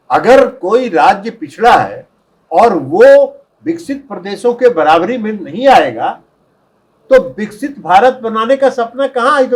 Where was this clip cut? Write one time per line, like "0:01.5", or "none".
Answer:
none